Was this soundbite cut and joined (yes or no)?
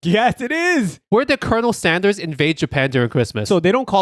yes